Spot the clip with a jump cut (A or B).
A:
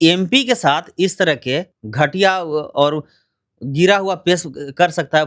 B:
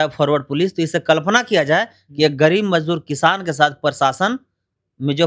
A